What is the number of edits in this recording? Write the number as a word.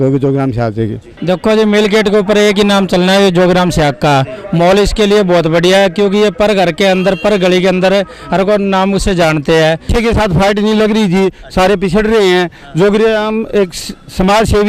two